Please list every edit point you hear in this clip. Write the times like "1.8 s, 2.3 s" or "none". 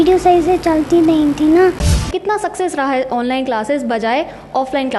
2.0 s